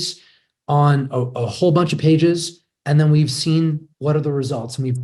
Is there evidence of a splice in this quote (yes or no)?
no